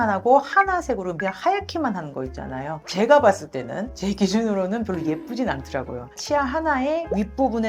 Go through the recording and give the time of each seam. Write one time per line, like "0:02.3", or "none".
0:06.2